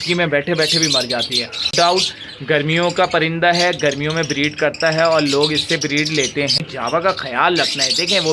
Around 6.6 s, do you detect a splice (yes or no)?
yes